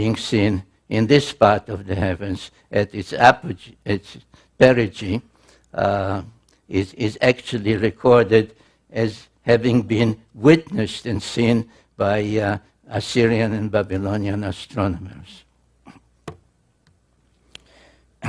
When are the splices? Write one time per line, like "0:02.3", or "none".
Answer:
0:16.5